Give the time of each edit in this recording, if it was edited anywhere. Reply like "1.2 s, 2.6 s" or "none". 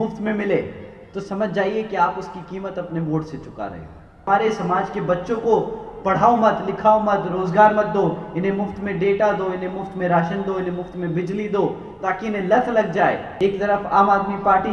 4.3 s, 13.3 s